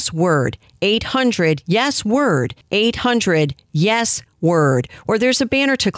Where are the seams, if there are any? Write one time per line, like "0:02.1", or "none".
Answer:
0:02.6